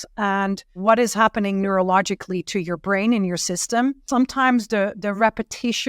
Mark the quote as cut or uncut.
cut